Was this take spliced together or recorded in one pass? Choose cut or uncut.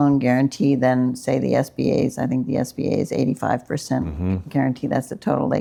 uncut